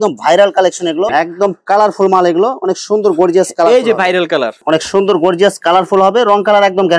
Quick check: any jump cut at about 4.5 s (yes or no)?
yes